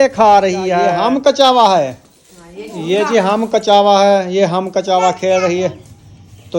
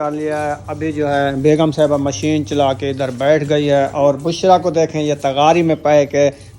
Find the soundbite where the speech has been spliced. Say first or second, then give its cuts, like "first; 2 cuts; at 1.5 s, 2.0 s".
first; 1 cut; at 0.9 s